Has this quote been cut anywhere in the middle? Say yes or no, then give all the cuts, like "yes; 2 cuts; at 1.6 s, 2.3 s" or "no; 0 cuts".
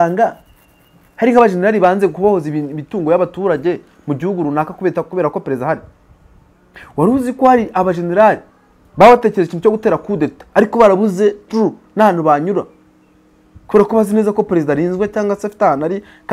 no; 0 cuts